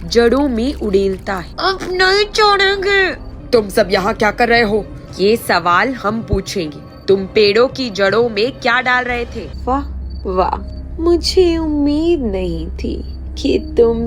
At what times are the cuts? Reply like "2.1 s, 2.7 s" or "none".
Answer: 1.4 s, 3.3 s, 5.0 s, 9.5 s